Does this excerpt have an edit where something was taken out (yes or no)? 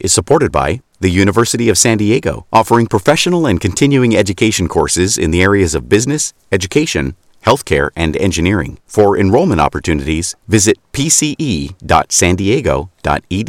no